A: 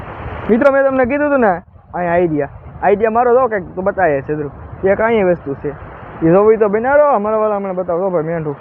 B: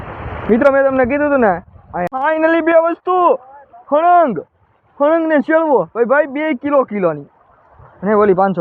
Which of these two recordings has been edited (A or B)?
B